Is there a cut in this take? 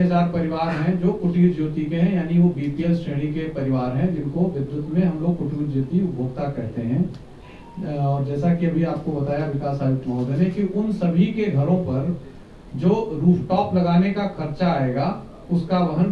no; 0 cuts

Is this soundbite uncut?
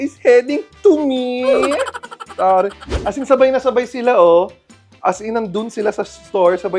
no; 1 cut; at 2.9 s

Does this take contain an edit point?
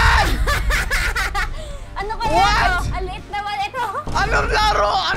no; 0 cuts

